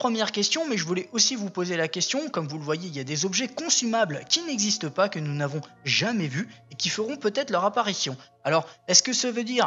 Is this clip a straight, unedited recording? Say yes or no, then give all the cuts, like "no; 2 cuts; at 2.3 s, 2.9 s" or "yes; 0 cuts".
yes; 0 cuts